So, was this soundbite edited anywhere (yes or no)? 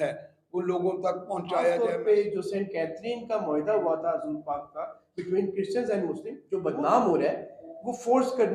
yes